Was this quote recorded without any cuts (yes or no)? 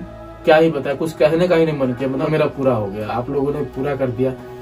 no